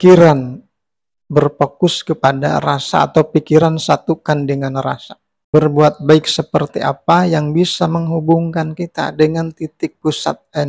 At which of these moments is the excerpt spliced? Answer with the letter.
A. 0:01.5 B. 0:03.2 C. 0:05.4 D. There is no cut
C